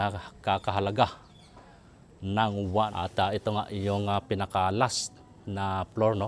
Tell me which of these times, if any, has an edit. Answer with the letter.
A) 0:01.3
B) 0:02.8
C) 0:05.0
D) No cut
B